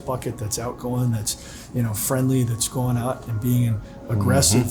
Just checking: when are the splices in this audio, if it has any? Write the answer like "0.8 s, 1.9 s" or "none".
none